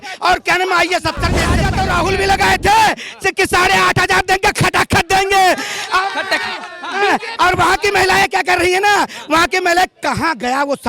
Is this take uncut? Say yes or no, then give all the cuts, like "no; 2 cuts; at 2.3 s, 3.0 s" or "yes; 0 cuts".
no; 1 cut; at 1.6 s